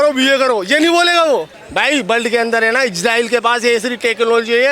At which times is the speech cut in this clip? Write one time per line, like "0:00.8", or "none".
0:01.6